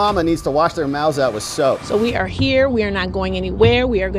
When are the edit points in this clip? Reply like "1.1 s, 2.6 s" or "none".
1.8 s